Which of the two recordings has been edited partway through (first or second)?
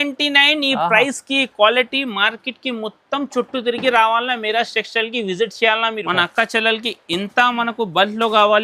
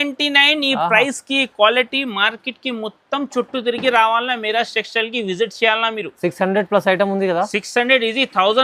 first